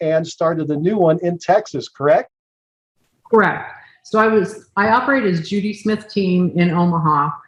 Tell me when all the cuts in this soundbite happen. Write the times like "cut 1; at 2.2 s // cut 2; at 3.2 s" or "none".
none